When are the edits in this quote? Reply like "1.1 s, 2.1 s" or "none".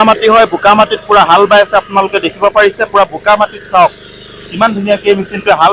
none